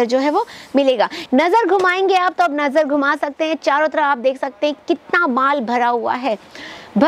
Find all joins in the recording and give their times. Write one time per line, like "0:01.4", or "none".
0:01.2